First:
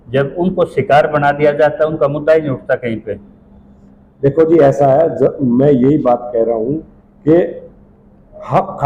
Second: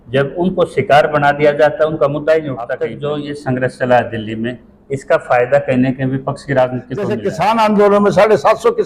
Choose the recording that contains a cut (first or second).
second